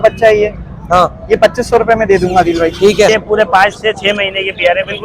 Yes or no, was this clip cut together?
yes